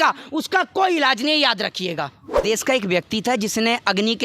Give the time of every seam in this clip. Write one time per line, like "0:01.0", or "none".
0:02.4